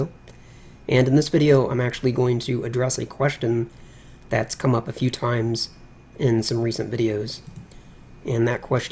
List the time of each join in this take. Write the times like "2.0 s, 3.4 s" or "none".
none